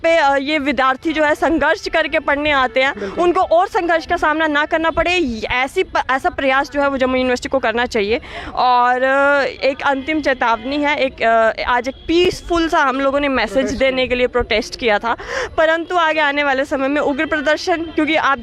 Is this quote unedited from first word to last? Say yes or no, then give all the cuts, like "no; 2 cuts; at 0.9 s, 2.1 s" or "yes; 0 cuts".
yes; 0 cuts